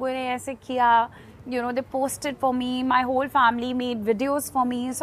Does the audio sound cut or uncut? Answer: uncut